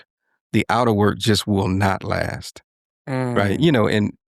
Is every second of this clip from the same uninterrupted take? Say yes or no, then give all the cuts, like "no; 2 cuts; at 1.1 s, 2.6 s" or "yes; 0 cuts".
yes; 0 cuts